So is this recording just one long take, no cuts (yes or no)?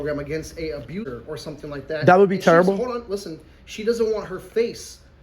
no